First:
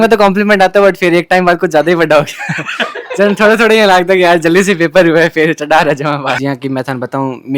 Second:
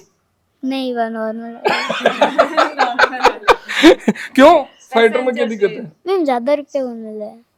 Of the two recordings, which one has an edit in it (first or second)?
first